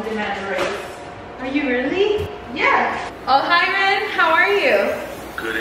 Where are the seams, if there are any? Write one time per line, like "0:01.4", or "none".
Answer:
0:03.1